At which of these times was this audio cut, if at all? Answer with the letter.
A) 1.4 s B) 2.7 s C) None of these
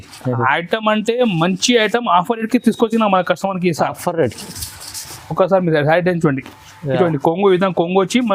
C